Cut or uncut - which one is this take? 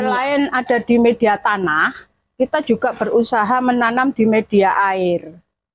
uncut